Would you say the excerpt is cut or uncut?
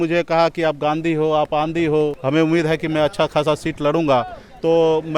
cut